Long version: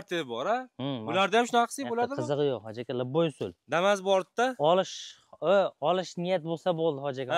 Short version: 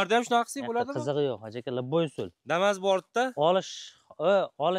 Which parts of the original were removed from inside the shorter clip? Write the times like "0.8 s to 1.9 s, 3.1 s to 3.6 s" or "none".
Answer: none